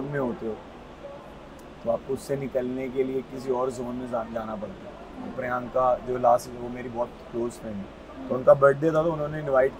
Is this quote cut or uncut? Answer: uncut